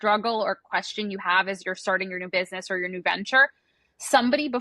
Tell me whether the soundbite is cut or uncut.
uncut